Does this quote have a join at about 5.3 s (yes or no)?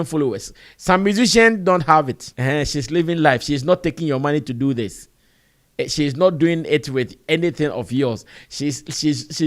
no